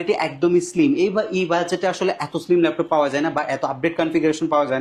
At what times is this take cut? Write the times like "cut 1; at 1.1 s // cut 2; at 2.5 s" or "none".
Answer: none